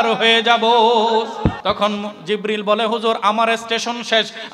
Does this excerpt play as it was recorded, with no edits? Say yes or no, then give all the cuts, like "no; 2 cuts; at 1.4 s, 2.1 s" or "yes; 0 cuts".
no; 1 cut; at 1.6 s